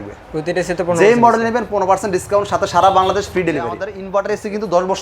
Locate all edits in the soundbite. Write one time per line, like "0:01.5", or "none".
0:03.9